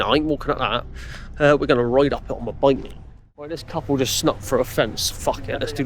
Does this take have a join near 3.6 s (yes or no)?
yes